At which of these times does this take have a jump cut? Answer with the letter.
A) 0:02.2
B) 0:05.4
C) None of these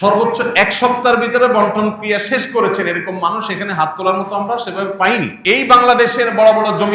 B